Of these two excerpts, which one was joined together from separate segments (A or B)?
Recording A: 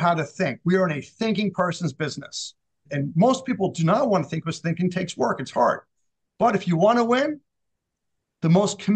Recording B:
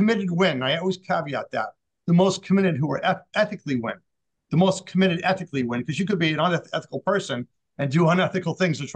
A